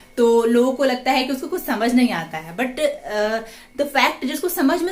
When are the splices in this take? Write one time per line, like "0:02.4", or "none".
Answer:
none